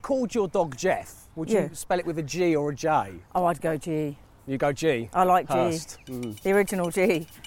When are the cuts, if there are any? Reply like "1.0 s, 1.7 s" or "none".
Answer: 3.2 s